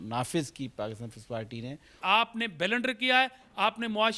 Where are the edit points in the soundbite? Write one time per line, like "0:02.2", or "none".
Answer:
0:01.9

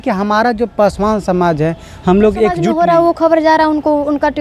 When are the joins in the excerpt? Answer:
0:02.6

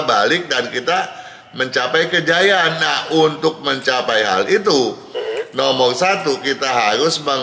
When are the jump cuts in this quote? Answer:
none

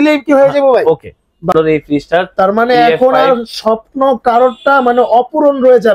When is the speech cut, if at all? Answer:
0:01.5

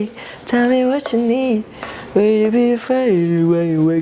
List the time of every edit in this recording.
none

